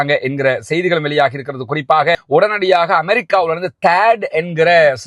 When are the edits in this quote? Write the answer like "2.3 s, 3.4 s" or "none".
2.1 s